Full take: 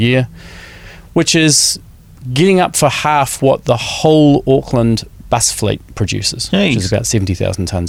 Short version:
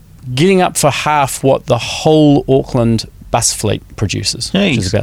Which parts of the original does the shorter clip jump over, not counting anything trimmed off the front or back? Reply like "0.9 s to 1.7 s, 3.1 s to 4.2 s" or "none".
none